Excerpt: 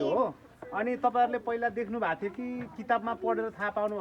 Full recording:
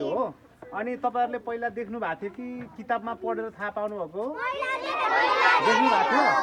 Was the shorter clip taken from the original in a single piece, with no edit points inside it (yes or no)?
yes